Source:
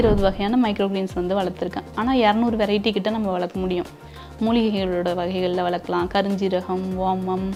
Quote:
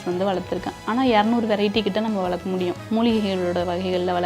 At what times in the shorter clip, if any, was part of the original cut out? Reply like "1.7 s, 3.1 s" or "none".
2.8 s